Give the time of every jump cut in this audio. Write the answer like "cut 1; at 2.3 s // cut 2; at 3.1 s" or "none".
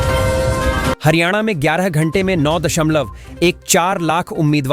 cut 1; at 1.0 s